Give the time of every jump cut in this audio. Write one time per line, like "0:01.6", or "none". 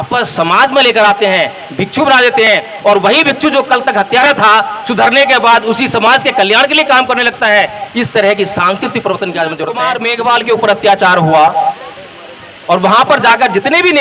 0:09.9